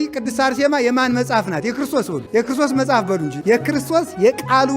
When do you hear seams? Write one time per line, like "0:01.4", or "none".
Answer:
0:02.2
0:03.3